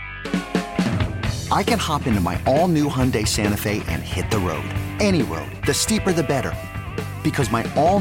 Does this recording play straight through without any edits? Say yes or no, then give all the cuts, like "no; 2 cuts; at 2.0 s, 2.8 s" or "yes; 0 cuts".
yes; 0 cuts